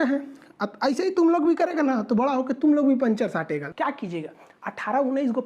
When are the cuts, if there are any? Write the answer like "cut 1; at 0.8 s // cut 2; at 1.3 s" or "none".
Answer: cut 1; at 3.7 s